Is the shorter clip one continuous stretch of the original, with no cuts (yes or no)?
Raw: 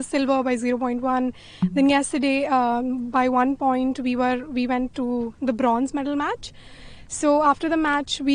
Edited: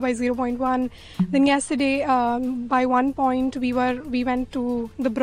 yes